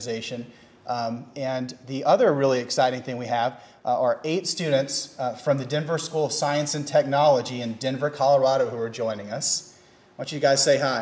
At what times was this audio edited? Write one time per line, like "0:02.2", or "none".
0:07.0